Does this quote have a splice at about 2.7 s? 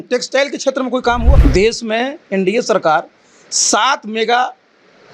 no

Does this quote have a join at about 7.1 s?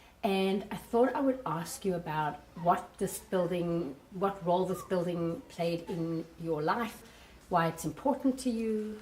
yes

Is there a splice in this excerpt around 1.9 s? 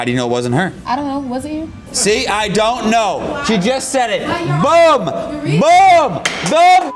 yes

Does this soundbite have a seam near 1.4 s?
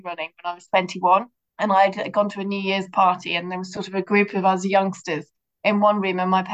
yes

